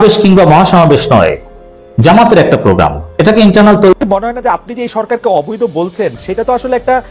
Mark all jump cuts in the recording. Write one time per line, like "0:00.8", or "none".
0:04.0